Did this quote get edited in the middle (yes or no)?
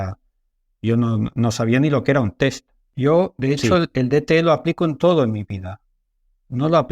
yes